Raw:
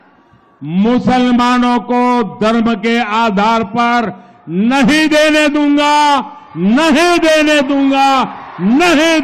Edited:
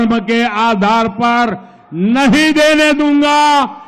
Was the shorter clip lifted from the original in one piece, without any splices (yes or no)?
yes